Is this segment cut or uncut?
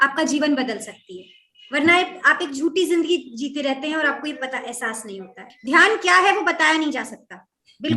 cut